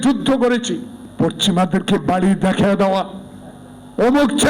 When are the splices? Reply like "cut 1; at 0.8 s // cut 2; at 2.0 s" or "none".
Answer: cut 1; at 1.0 s